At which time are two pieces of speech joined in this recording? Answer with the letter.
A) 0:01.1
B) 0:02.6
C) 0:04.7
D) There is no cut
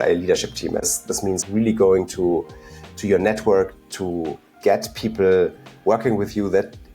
A